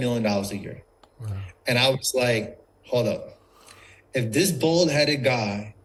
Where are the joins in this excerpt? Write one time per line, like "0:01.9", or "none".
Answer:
none